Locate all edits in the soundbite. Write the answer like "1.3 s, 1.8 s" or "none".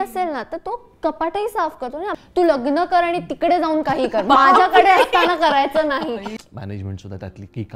2.2 s, 6.4 s